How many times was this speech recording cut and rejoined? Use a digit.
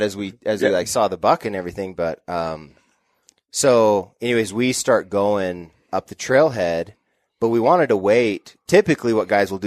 0